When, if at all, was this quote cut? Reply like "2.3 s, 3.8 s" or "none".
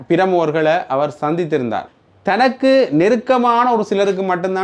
1.9 s